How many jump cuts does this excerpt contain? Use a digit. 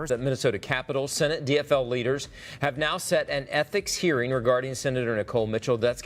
0